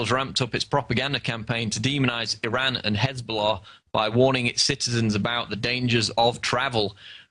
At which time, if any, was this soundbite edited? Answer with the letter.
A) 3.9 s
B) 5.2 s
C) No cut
B